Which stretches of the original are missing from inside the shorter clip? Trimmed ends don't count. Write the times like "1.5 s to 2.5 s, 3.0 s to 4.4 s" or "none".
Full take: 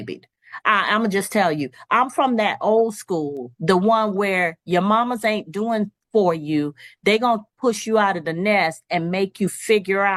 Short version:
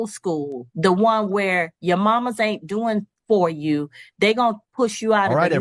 none